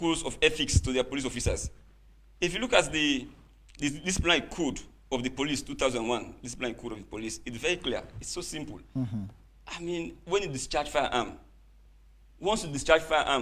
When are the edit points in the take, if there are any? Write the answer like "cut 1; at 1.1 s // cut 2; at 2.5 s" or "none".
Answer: none